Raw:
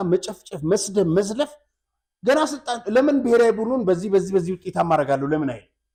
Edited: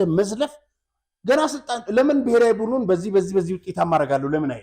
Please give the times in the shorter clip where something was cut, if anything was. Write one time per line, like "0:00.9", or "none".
none